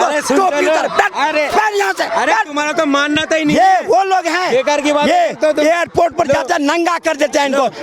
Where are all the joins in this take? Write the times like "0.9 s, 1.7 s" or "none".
none